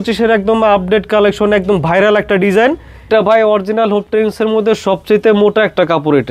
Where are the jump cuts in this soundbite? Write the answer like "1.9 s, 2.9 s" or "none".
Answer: 3.1 s